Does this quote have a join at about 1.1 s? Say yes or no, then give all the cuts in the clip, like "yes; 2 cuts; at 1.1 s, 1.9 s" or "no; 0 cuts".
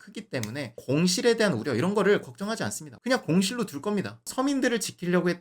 no; 2 cuts; at 3.0 s, 4.2 s